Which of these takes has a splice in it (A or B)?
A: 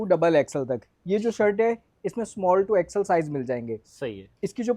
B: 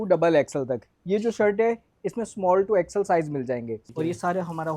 B